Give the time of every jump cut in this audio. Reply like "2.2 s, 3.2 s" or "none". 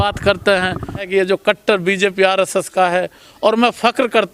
1.0 s